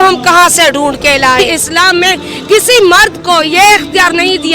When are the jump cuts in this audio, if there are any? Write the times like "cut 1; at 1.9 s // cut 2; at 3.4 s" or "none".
cut 1; at 1.4 s